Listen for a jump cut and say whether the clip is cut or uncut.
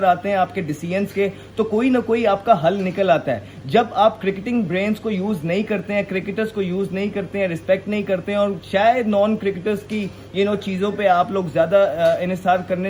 uncut